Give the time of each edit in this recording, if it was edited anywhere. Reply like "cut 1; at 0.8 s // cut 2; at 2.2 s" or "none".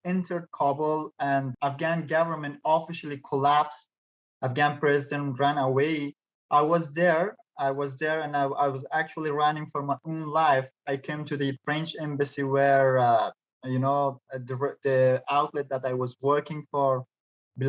cut 1; at 1.5 s